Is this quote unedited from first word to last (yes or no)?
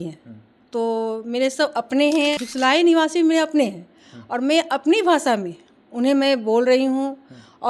no